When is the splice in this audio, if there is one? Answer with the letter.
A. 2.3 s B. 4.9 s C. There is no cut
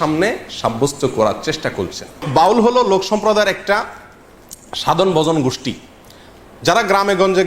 A